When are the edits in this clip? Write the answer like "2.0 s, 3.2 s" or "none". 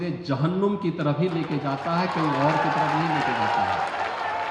none